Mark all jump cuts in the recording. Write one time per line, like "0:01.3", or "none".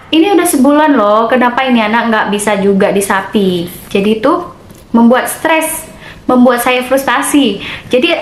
none